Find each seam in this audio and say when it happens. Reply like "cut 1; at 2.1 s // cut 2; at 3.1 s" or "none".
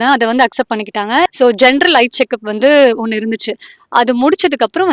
cut 1; at 1.3 s